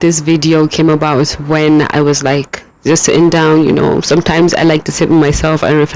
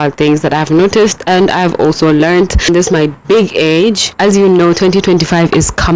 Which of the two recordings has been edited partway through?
second; 2 cuts; at 2.7 s, 4.1 s

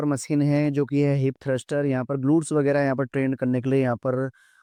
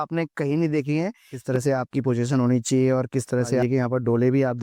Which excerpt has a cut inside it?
second; 2 cuts; at 1.3 s, 3.6 s

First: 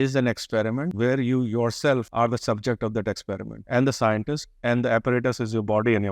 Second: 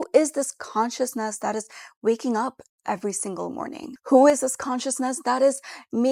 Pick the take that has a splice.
first; 3 cuts; at 0.9 s, 2.1 s, 3.5 s

